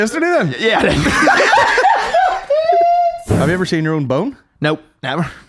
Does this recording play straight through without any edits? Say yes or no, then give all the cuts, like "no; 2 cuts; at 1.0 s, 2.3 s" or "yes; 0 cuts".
no; 1 cut; at 3.3 s